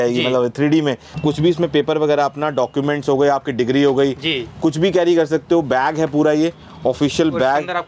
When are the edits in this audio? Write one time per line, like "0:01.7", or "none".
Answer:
0:01.2